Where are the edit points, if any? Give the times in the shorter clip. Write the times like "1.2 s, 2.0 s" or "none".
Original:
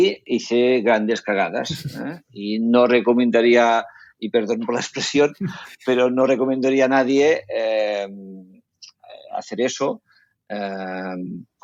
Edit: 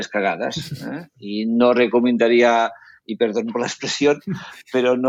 none